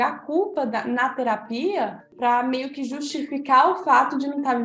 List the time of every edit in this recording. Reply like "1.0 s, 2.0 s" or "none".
2.0 s

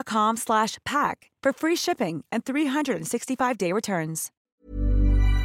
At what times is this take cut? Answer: 4.3 s

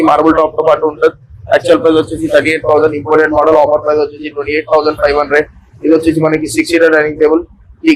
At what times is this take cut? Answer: none

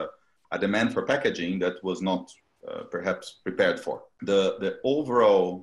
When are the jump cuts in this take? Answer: 4.1 s

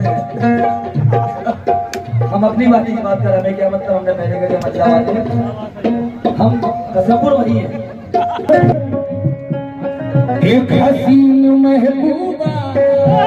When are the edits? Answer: 8.5 s

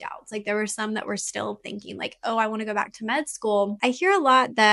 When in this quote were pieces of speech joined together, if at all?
3.8 s

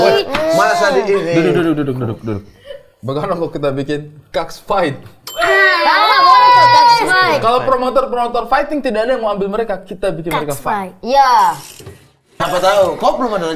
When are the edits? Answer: 12.2 s

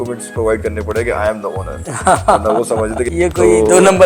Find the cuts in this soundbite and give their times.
3.0 s

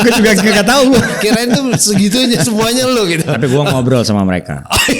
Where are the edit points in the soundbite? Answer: none

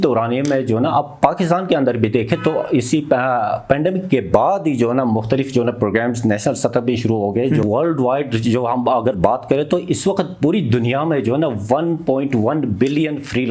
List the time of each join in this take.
7.6 s

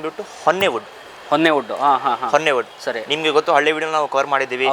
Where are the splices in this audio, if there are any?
none

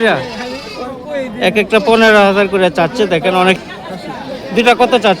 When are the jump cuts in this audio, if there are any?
3.6 s

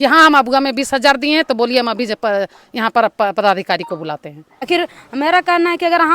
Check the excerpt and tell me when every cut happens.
4.7 s

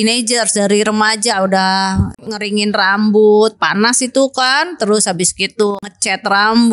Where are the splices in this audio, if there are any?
2.2 s, 5.7 s

